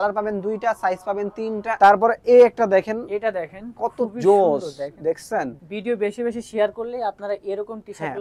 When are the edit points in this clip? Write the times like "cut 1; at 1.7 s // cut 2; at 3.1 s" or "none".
cut 1; at 1.8 s // cut 2; at 5.6 s